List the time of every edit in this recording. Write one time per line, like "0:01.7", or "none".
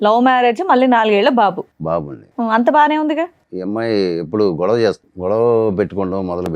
0:03.5
0:05.1